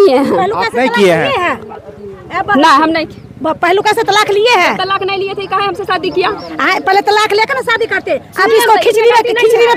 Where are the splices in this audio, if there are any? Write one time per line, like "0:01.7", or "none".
none